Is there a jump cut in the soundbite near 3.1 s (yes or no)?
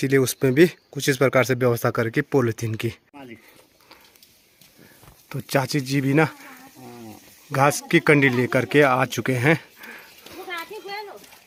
no